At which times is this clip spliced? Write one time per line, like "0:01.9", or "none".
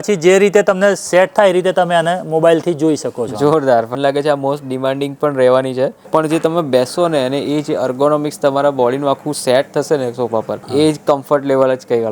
0:03.9
0:06.0